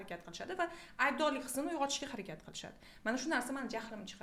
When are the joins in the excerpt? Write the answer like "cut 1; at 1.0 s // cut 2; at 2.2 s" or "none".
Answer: none